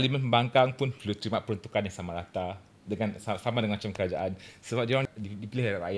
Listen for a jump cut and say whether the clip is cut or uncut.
cut